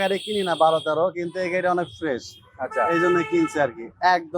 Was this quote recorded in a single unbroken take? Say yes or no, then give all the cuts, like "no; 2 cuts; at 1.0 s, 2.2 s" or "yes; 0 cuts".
yes; 0 cuts